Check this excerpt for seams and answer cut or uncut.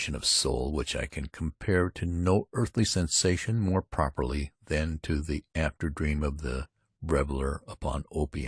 cut